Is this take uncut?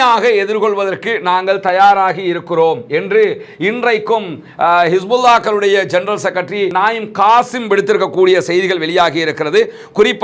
yes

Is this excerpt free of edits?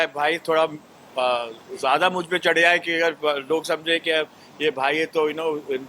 yes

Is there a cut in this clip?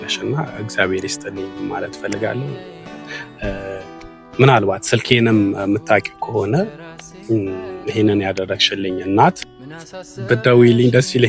no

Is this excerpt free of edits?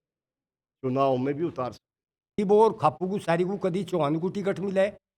no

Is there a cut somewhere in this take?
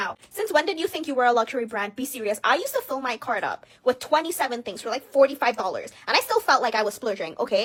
no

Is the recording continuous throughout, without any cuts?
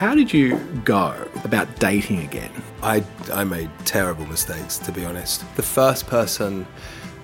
no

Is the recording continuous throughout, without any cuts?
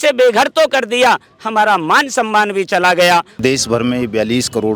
no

